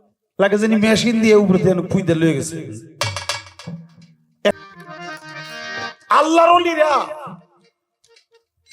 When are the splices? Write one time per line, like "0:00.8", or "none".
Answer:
0:04.5